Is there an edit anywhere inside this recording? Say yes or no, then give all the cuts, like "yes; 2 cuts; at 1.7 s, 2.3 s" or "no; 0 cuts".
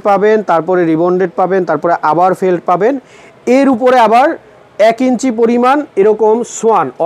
no; 0 cuts